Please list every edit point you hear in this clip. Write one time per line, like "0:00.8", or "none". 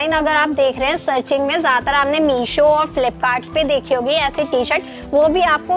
none